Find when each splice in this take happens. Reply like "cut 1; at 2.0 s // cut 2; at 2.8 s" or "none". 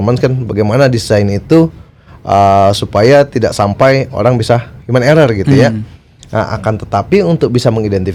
none

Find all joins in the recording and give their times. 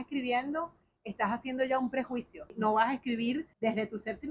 cut 1; at 2.5 s // cut 2; at 3.5 s

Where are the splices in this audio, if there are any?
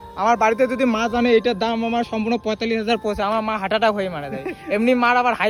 none

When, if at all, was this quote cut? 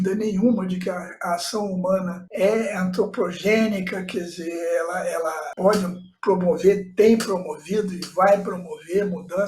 cut 1; at 5.5 s

